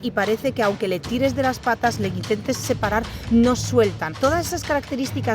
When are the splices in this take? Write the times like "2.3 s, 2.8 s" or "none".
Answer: 4.1 s